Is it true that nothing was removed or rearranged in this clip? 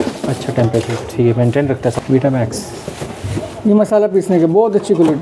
no; 1 cut; at 1.9 s

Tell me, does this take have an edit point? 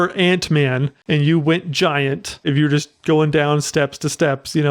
yes; 2 cuts; at 0.9 s, 2.4 s

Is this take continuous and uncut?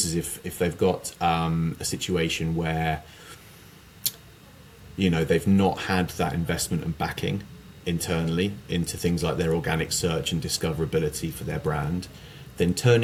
yes; 0 cuts

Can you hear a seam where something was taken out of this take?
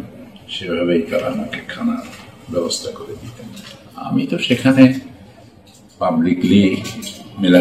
yes; 1 cut; at 3.3 s

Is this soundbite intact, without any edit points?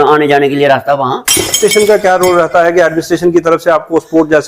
no; 1 cut; at 1.6 s

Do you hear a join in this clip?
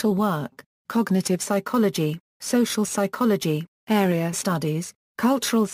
no; 0 cuts

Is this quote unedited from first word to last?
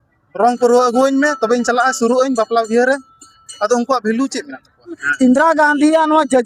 no; 1 cut; at 5.0 s

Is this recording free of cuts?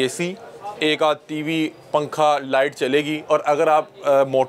yes; 0 cuts

